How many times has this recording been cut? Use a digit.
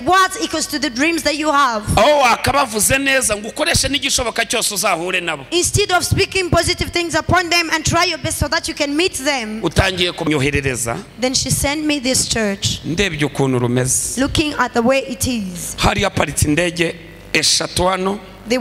1